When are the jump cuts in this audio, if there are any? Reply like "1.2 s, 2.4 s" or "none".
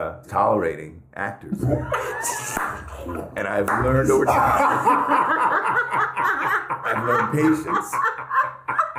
3.2 s